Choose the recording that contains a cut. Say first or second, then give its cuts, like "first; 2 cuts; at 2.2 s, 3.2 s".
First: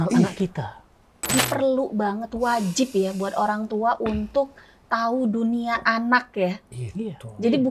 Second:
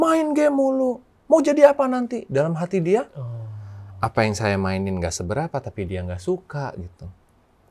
first; 1 cut; at 1.3 s